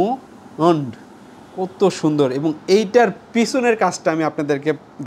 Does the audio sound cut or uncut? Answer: uncut